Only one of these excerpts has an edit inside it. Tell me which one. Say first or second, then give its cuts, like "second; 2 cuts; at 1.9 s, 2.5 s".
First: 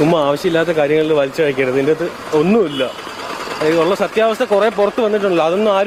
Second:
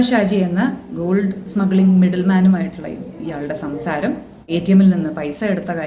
second; 1 cut; at 4.5 s